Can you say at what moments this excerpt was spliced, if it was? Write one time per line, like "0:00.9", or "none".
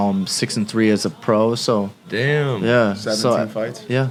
none